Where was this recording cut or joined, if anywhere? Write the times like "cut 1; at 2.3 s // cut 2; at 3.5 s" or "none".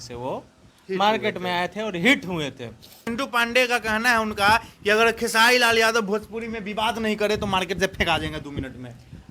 cut 1; at 3.1 s